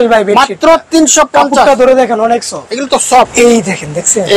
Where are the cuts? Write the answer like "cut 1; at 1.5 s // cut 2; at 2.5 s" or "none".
cut 1; at 3.3 s